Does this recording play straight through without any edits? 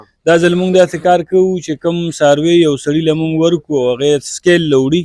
yes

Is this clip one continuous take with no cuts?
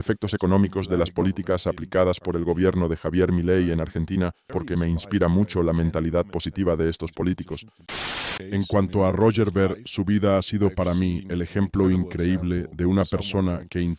no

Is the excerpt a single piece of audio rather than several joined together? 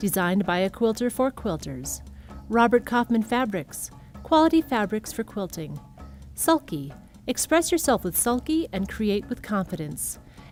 yes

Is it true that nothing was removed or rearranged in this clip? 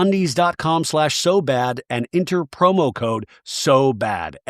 yes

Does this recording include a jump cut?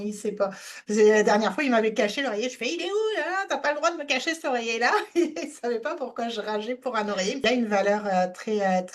yes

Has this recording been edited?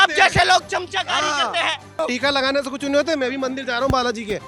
yes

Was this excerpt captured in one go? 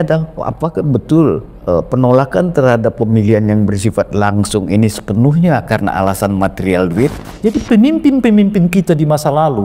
no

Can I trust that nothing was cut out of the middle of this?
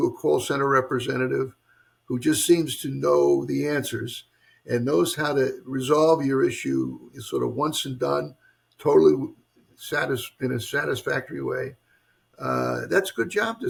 yes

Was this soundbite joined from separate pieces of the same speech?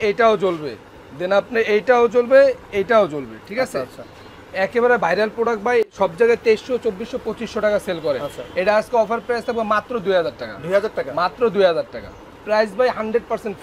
no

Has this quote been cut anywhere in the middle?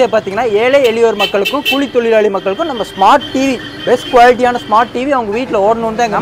no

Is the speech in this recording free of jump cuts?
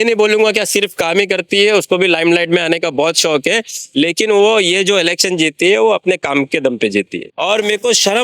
no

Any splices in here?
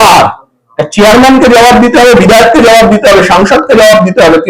no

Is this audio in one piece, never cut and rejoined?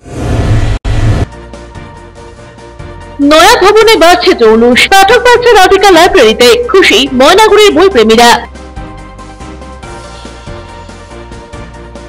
yes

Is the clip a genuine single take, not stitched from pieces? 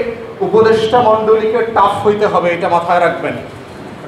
yes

